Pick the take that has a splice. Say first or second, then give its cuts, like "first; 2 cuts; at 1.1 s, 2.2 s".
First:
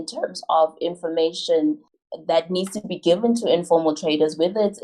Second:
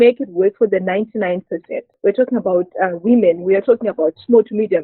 second; 1 cut; at 1.8 s